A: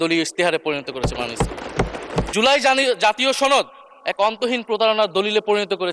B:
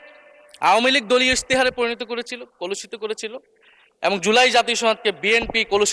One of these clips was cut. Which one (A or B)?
A